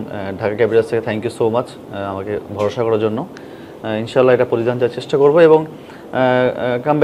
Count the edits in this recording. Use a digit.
0